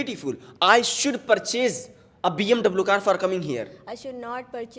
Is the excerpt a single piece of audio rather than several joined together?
yes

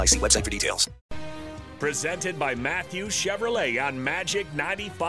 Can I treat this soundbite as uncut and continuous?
no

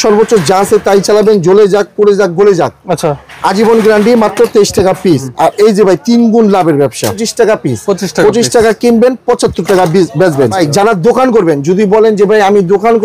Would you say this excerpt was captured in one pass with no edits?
no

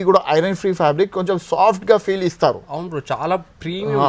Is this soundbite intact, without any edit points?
yes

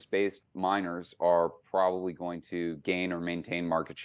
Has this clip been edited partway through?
no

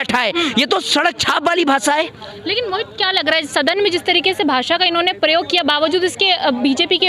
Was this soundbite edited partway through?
no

